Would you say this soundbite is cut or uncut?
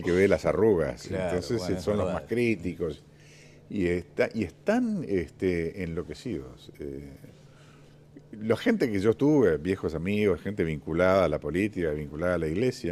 uncut